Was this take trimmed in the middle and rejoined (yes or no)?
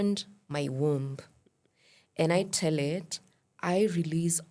no